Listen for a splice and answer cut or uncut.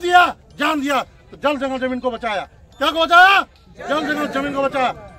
uncut